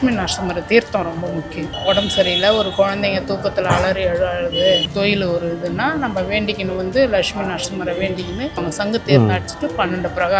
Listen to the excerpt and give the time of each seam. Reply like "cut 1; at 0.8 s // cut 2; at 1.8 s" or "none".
cut 1; at 1.7 s // cut 2; at 4.8 s // cut 3; at 8.6 s